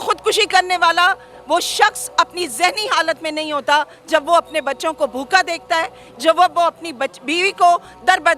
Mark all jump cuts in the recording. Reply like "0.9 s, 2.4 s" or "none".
none

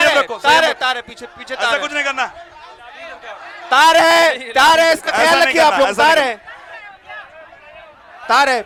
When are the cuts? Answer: none

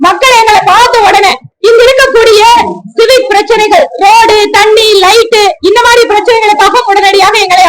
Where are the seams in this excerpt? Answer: 1.5 s

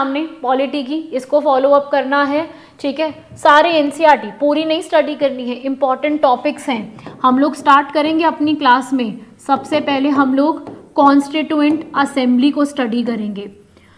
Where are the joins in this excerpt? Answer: none

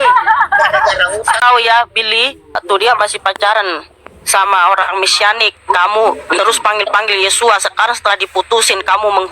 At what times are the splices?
1.4 s, 2.6 s

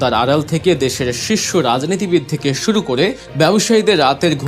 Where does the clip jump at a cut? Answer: 3.2 s

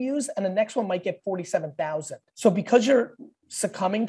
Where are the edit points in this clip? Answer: 2.2 s

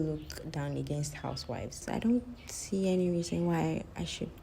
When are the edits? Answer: 1.8 s

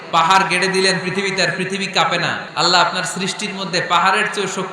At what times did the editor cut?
2.4 s

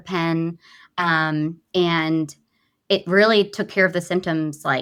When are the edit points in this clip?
none

